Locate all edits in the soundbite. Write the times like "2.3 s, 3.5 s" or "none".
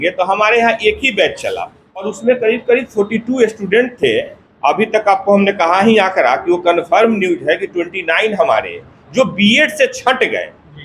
2.1 s